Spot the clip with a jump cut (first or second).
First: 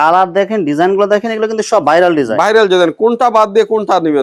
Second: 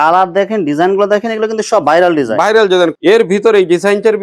second